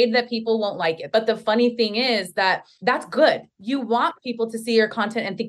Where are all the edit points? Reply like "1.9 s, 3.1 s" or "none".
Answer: 1.0 s, 2.7 s, 3.5 s